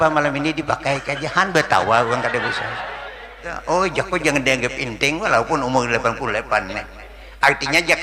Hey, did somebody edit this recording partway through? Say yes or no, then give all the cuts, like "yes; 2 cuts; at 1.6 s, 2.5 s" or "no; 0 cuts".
yes; 1 cut; at 3.5 s